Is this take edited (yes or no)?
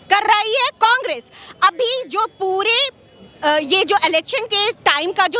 no